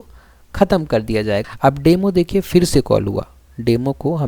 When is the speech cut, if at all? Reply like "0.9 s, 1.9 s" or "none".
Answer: 1.4 s